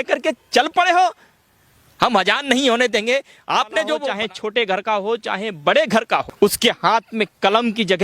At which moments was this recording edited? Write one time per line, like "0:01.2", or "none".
0:04.1
0:06.3